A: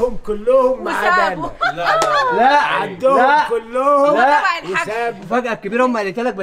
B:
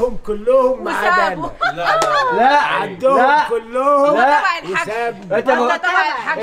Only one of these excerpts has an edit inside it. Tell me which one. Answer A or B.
A